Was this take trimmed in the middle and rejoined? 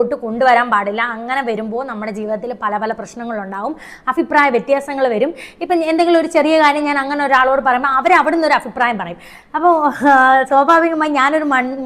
no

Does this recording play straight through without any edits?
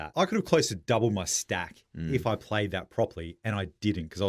yes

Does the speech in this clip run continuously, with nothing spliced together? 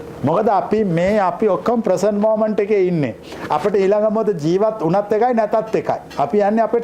yes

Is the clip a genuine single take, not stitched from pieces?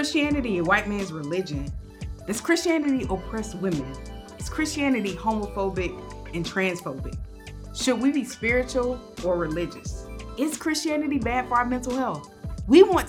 yes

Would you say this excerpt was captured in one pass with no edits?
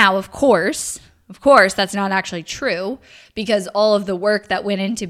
yes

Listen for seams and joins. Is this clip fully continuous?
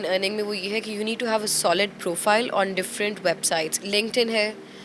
no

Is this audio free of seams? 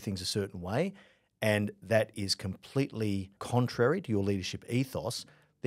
no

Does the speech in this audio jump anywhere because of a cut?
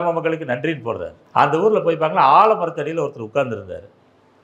yes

